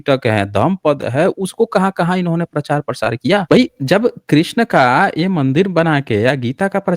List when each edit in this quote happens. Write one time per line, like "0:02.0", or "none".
0:03.4